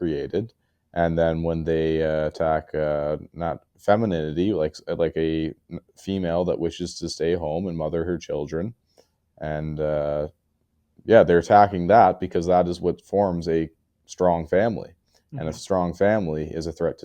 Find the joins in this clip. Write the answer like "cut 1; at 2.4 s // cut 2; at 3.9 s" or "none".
none